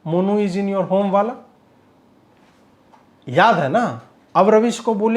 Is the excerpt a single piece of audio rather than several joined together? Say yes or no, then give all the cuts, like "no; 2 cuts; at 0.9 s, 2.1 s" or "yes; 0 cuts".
yes; 0 cuts